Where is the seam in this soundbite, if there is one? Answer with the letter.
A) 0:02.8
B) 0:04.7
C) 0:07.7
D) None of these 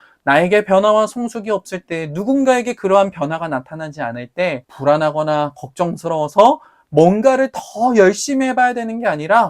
B